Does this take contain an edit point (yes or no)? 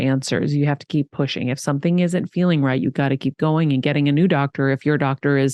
no